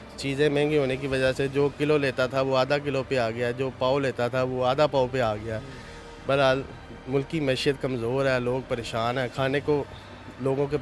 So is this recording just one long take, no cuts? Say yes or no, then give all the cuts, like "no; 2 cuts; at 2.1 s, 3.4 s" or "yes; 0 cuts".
yes; 0 cuts